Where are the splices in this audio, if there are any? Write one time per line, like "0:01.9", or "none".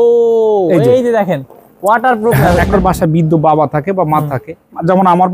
0:02.7